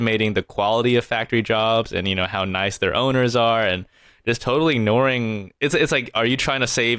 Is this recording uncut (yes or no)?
yes